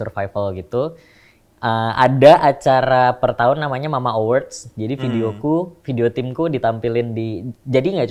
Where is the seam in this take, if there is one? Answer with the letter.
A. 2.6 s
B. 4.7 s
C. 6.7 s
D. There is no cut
D